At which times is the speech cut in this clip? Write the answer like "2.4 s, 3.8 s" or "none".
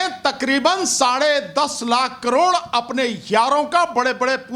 none